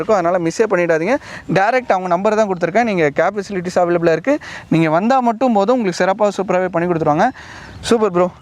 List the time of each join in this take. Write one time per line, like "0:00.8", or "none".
none